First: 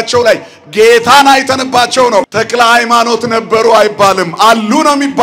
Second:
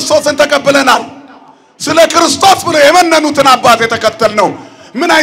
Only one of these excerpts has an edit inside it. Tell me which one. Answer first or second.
first